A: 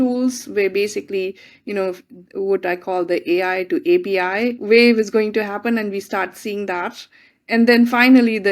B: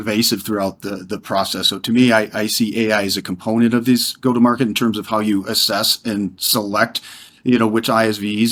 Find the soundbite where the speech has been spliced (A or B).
A